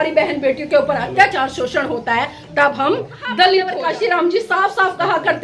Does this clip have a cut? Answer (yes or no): yes